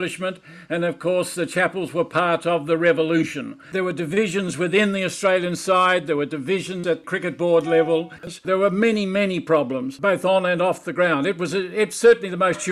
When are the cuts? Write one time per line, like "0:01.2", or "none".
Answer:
0:03.6
0:08.2